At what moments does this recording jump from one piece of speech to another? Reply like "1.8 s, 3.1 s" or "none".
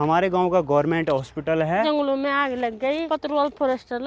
1.8 s, 3.0 s